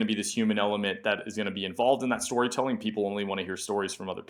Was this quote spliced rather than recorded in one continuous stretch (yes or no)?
no